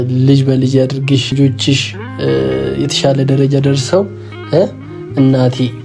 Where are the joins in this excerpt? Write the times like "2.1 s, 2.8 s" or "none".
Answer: 1.3 s